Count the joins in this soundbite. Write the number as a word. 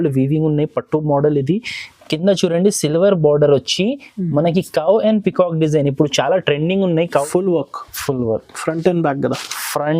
one